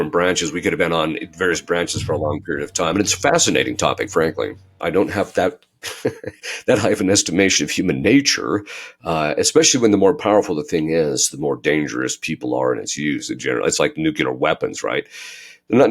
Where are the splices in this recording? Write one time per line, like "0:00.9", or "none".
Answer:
0:04.8